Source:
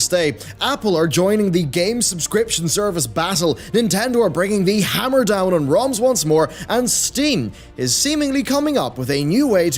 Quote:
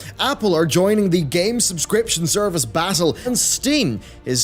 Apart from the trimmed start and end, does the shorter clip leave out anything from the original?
yes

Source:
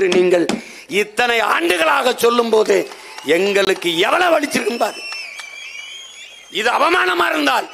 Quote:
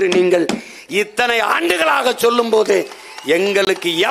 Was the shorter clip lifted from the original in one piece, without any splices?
yes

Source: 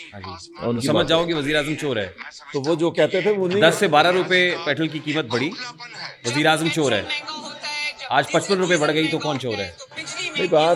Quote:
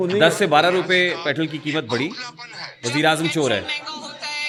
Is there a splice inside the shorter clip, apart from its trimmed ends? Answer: no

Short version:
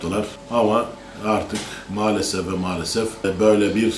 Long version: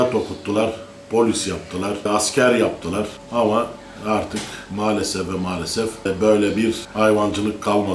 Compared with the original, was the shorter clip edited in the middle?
no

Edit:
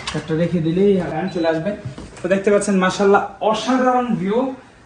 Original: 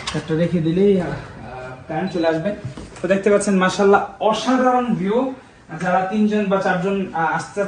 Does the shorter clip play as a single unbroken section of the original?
no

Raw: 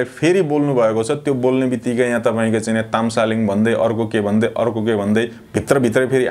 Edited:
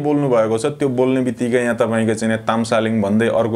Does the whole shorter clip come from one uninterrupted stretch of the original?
yes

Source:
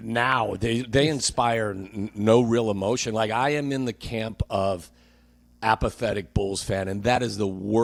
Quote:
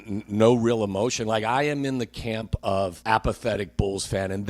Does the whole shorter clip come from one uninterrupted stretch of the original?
no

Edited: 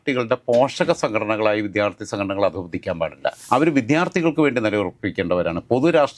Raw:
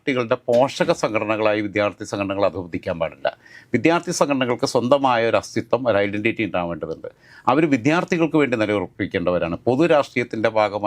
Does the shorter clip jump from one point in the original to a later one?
yes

